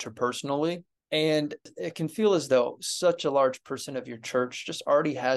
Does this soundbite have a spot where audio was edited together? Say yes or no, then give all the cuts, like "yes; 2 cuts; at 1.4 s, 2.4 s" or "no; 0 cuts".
yes; 2 cuts; at 0.9 s, 1.7 s